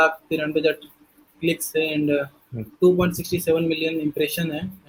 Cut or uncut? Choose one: uncut